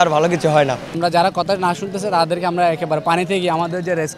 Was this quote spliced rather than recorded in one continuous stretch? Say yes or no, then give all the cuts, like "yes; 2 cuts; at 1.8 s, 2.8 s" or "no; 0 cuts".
yes; 1 cut; at 1.0 s